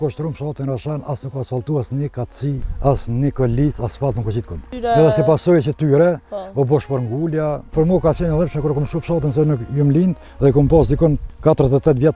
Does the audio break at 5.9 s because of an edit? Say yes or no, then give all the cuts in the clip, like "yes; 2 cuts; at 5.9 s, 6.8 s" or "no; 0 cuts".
no; 5 cuts; at 2.7 s, 4.7 s, 7.7 s, 10.3 s, 11.3 s